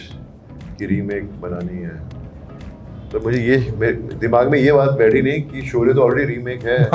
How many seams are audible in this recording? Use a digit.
0